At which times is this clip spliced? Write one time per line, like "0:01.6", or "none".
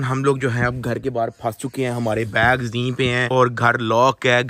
none